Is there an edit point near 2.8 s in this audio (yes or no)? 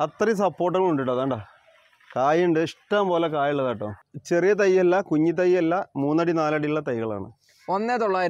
no